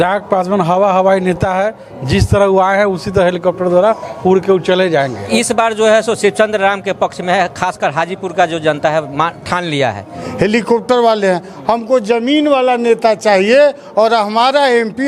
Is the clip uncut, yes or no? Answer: no